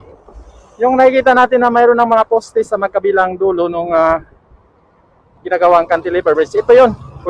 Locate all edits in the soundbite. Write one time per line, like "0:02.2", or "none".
none